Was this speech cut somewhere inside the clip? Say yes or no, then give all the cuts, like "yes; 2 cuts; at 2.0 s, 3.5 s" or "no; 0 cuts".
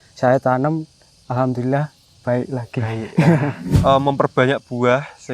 yes; 1 cut; at 3.7 s